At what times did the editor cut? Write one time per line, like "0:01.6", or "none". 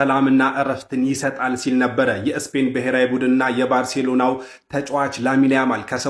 none